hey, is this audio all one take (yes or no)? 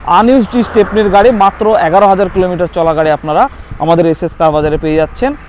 yes